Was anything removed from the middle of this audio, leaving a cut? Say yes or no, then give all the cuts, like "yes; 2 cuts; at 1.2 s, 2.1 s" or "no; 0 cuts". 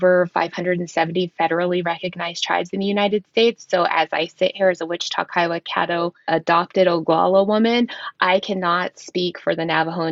no; 0 cuts